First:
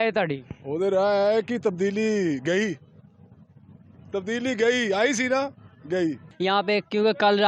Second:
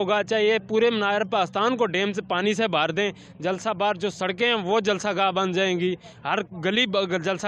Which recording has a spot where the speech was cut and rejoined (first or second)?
first